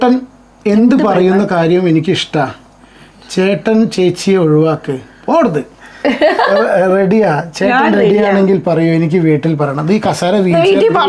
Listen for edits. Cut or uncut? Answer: uncut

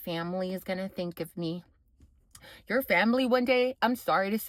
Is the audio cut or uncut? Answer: uncut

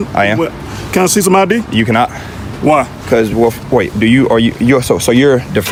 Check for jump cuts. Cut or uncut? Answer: uncut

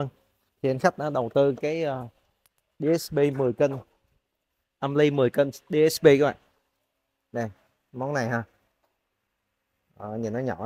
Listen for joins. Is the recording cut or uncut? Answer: uncut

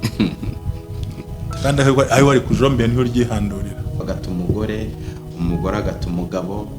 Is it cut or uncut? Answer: cut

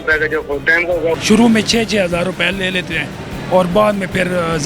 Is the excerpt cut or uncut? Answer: cut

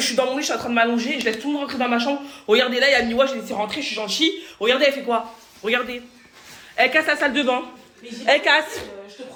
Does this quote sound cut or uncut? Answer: uncut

